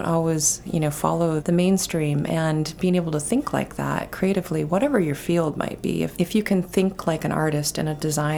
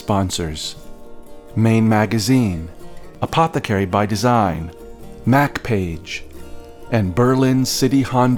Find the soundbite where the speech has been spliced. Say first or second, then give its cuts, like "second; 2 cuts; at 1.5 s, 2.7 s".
first; 2 cuts; at 1.4 s, 6.1 s